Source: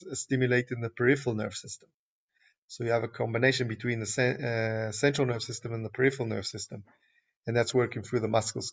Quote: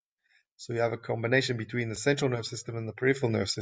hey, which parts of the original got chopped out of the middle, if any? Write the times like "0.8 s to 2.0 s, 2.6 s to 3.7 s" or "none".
4.1 s to 4.9 s